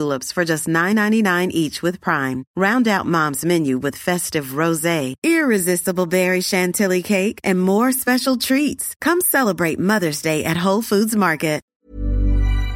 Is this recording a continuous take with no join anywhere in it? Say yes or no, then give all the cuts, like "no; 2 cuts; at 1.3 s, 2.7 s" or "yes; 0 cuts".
no; 1 cut; at 11.7 s